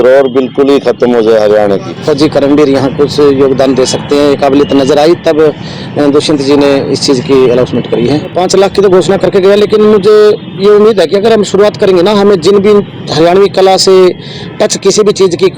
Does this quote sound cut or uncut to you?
cut